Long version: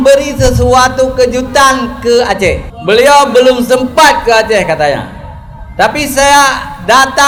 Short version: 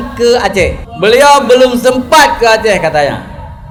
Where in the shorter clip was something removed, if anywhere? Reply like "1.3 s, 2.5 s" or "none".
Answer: none